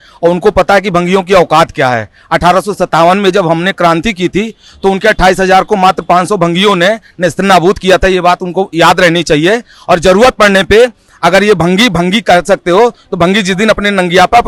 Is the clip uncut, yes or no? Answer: yes